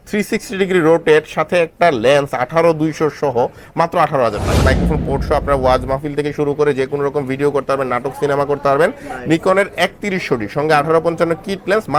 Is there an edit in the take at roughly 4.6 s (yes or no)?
yes